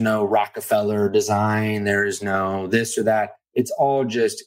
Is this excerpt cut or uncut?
cut